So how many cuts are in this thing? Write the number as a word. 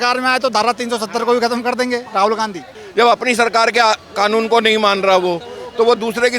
one